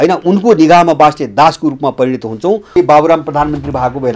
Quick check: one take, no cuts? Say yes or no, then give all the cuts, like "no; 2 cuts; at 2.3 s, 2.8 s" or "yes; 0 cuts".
no; 1 cut; at 2.8 s